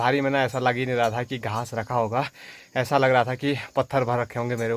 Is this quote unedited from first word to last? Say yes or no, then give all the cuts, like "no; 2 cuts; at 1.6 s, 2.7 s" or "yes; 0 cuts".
yes; 0 cuts